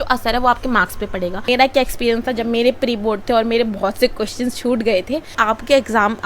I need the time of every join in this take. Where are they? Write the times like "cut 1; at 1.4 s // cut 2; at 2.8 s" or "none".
cut 1; at 1.5 s // cut 2; at 5.4 s